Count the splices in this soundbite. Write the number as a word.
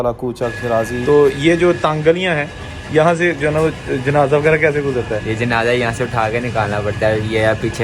one